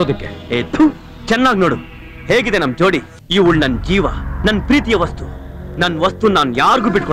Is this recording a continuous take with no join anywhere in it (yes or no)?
no